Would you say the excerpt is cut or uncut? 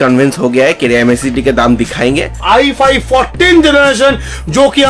cut